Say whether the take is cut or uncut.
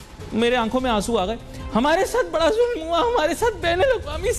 uncut